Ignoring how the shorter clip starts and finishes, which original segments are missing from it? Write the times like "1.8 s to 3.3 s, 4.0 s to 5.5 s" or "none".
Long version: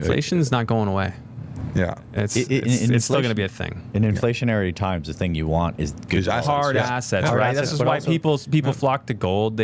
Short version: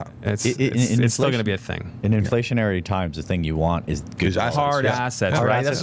none